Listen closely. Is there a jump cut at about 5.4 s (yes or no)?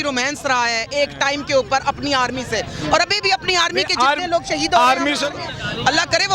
yes